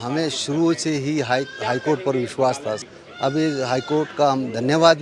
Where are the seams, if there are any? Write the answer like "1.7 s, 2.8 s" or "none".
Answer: 2.8 s